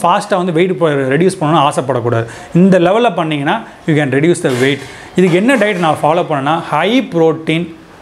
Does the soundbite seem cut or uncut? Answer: uncut